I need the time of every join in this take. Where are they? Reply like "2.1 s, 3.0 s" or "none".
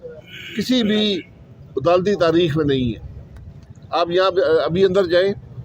none